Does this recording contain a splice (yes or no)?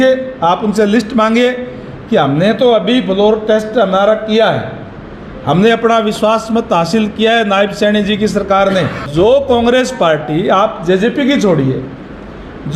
yes